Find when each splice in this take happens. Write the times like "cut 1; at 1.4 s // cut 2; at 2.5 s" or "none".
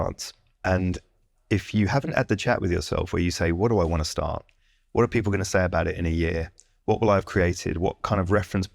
none